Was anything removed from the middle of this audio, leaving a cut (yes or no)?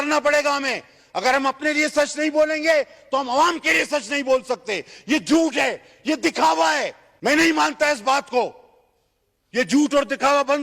yes